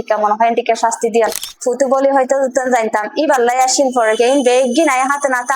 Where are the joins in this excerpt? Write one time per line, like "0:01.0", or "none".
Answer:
0:01.5